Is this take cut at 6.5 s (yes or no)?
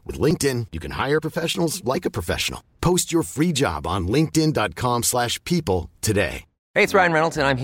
yes